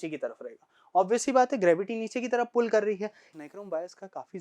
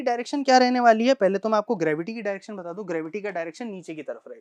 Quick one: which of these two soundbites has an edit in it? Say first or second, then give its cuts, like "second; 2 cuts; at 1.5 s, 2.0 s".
first; 1 cut; at 3.3 s